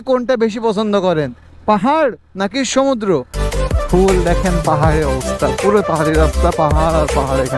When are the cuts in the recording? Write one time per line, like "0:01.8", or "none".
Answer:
0:03.4